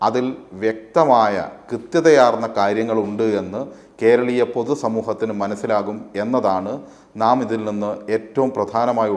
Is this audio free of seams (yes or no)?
yes